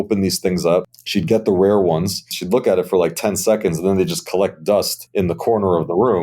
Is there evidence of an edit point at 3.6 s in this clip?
no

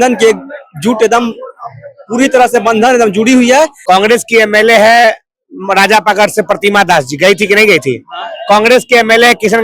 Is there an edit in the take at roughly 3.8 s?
yes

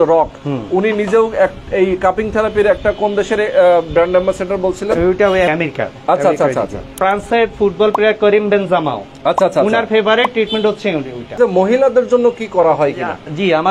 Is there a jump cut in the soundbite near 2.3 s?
no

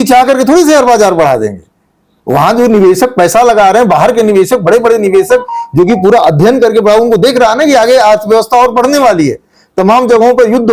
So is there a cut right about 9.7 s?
no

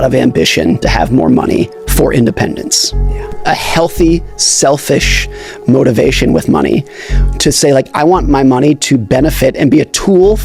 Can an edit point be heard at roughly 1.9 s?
no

